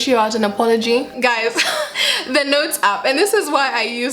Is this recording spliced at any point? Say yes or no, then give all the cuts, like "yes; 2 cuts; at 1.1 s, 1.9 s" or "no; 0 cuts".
yes; 2 cuts; at 1.1 s, 2.1 s